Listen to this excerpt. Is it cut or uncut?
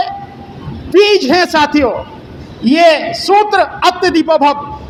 uncut